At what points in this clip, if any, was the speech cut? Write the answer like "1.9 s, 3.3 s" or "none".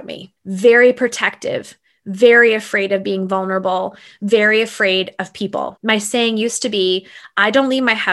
5.8 s